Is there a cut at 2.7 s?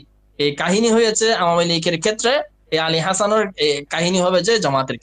no; 0 cuts

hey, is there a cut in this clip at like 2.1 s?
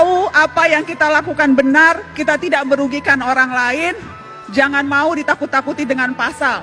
no; 0 cuts

